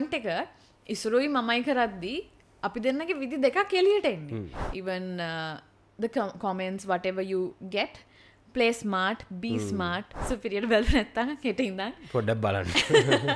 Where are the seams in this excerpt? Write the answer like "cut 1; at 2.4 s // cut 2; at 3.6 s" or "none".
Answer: cut 1; at 4.6 s // cut 2; at 10.1 s